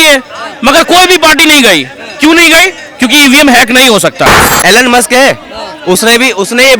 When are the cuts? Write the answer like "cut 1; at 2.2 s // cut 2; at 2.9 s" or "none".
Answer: cut 1; at 4.4 s